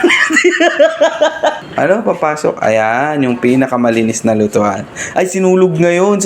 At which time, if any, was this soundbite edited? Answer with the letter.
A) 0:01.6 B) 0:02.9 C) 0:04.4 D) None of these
A